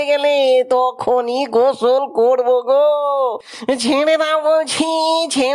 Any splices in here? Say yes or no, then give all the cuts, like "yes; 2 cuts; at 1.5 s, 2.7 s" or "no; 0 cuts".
no; 0 cuts